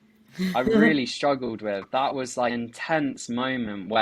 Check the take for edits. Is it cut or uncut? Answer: cut